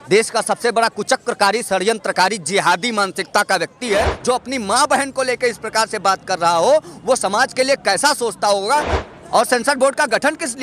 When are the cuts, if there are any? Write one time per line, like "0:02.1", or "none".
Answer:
0:04.1
0:09.0